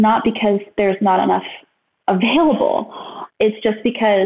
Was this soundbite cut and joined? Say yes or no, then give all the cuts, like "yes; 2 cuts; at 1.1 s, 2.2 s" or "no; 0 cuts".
yes; 1 cut; at 3.1 s